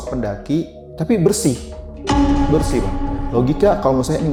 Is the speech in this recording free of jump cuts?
yes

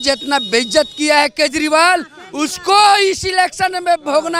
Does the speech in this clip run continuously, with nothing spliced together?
yes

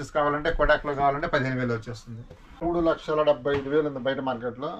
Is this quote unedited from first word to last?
no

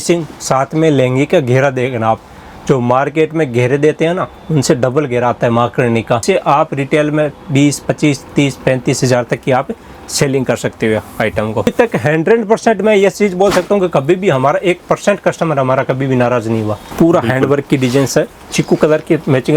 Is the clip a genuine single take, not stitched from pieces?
no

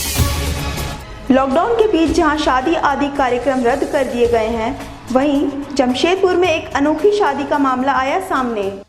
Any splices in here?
yes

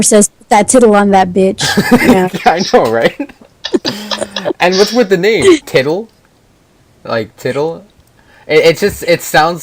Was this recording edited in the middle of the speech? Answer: yes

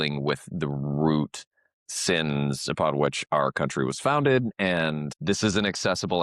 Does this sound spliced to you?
no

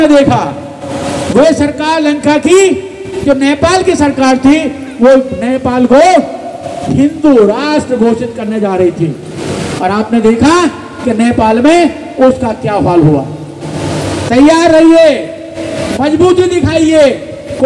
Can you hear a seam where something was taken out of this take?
no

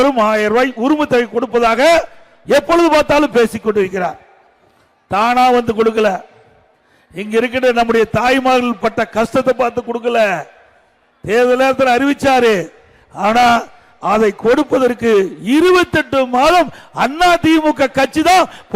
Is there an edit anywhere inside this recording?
no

